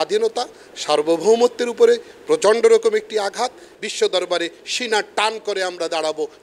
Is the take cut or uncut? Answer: cut